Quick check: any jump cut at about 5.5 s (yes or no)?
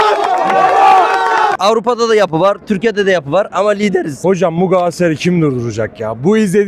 no